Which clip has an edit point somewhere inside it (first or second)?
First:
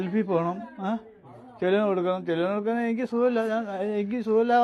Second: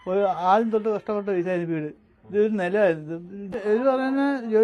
second